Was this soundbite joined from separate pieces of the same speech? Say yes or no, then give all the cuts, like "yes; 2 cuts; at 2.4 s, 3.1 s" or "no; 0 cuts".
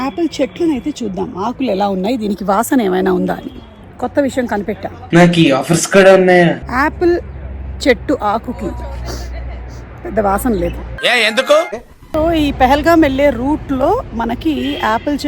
no; 0 cuts